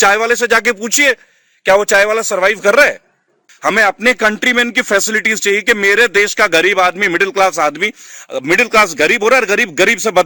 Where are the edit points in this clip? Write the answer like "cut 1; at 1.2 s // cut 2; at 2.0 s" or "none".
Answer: cut 1; at 3.4 s